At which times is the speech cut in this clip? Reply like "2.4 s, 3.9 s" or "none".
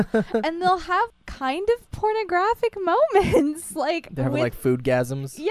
1.1 s

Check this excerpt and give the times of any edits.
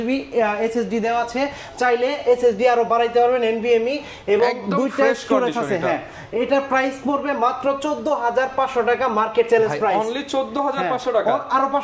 none

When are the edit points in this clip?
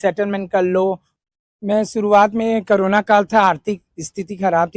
1.1 s

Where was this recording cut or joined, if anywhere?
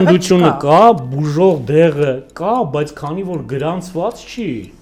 none

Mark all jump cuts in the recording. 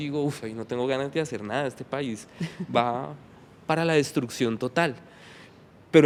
none

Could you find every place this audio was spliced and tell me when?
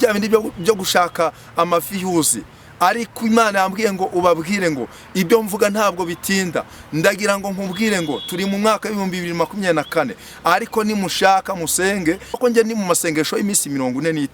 12.4 s

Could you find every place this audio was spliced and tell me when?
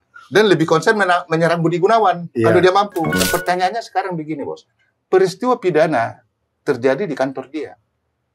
3.2 s

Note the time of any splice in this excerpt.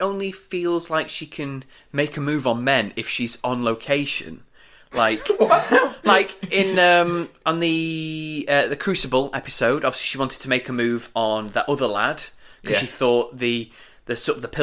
none

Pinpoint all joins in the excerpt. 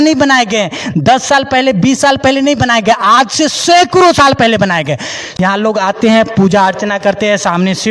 5.2 s

